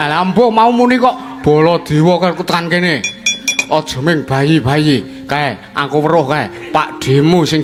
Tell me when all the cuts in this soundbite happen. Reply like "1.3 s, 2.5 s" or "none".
none